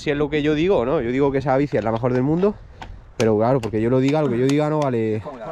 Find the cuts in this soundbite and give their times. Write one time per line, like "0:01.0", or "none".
none

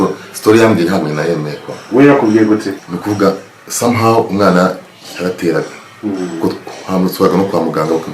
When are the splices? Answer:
0:02.7

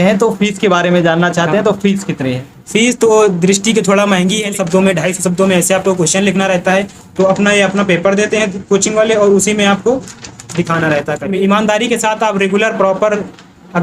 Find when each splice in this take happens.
0:04.5
0:11.2

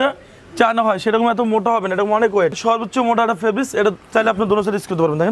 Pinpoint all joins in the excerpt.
0:02.6

